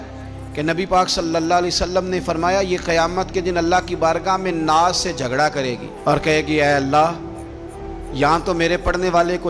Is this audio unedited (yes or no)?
yes